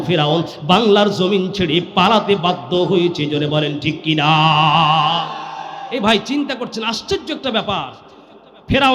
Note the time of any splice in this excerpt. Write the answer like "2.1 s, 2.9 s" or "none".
none